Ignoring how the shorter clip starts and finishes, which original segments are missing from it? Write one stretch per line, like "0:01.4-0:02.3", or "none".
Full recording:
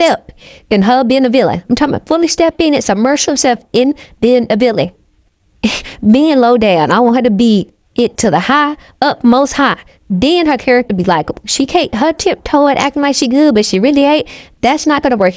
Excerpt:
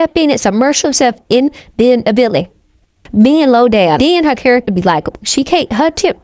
0:05.4-0:05.9
0:06.9-0:10.2